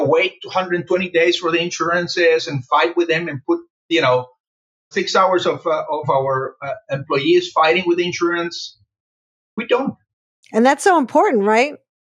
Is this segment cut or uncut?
uncut